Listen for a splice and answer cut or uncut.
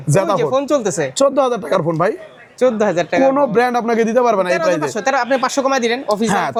uncut